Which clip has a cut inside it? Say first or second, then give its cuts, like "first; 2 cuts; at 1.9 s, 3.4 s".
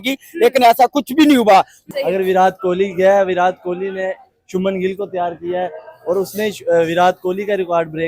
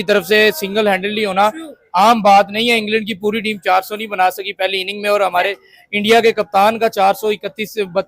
first; 1 cut; at 1.8 s